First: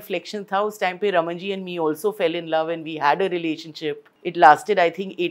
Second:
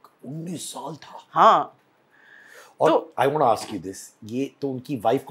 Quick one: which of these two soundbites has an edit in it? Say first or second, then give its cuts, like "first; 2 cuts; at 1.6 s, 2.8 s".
first; 1 cut; at 4.1 s